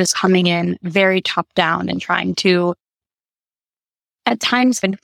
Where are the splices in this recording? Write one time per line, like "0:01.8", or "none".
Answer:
none